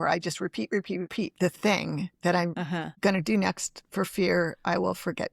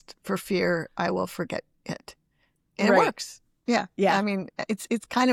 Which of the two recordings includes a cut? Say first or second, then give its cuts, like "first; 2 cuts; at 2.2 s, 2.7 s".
first; 2 cuts; at 1.1 s, 2.8 s